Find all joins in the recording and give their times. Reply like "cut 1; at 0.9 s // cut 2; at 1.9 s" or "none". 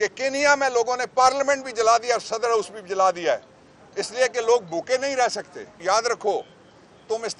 cut 1; at 5.8 s